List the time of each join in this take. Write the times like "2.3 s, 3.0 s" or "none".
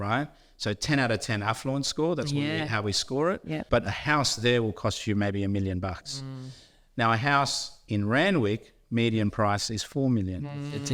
3.6 s

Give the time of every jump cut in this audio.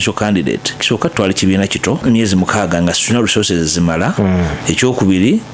0.8 s, 2.0 s, 4.6 s

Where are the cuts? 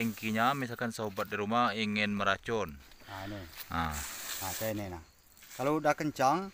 none

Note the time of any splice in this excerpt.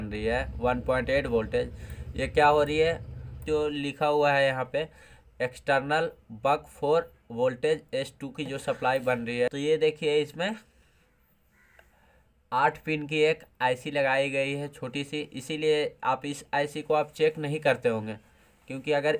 3.4 s, 9.5 s

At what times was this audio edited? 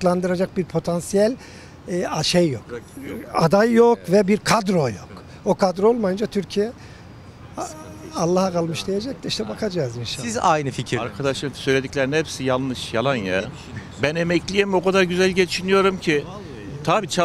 none

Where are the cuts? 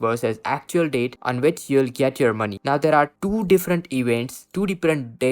2.6 s

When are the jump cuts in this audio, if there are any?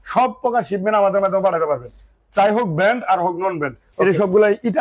3.8 s

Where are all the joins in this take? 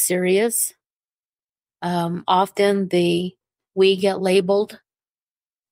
none

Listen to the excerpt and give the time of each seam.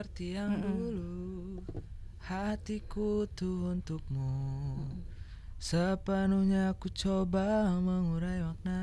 none

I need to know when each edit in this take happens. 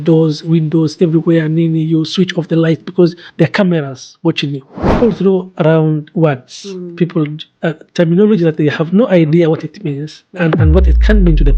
5.0 s

